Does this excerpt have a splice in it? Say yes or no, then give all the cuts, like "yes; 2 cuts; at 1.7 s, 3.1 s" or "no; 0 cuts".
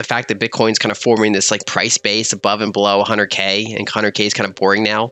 no; 0 cuts